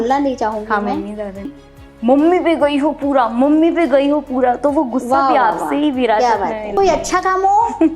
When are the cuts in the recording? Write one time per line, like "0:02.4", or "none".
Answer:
0:01.5
0:06.8